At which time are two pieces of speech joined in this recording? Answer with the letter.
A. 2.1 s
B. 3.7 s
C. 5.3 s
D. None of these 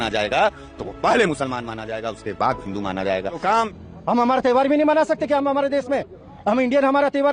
B